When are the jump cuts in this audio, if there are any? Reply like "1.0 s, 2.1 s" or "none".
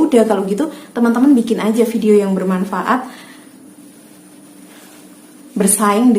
none

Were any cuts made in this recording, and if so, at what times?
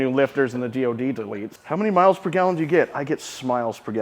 1.5 s

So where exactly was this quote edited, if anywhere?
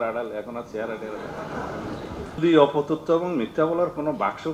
2.4 s

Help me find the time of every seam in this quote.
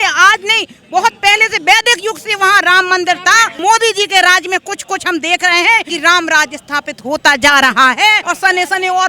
3.6 s, 5.9 s, 8.3 s

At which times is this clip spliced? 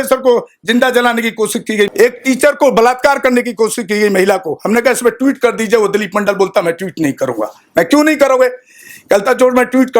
1.9 s

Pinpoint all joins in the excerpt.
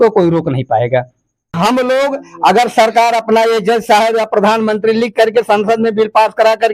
1.6 s

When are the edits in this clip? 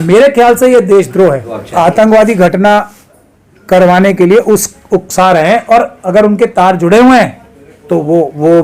1.6 s

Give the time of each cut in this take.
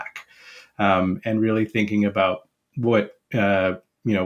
none

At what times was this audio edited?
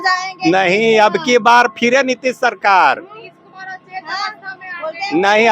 none

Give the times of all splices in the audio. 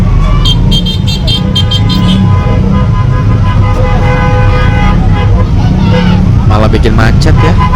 none

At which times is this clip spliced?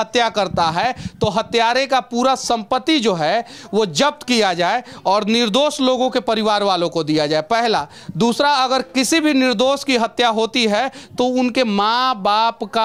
none

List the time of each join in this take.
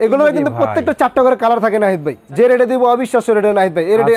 2.2 s

